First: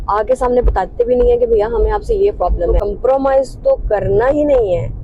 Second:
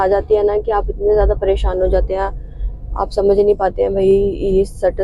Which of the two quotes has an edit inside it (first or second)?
first